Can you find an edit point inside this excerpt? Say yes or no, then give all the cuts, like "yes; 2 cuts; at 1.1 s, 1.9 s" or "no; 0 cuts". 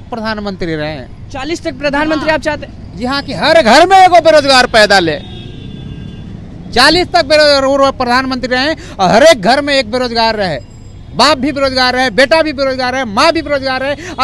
no; 0 cuts